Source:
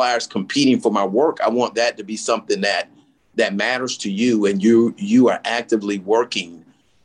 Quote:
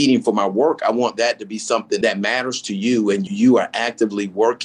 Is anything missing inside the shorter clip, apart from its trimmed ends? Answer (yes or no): yes